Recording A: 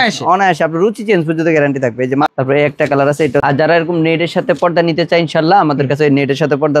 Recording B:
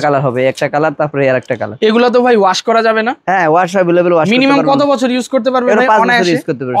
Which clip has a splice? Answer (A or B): A